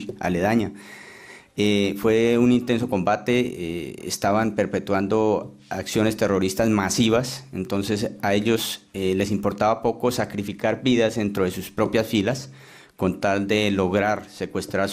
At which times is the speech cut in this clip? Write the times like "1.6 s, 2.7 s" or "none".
12.2 s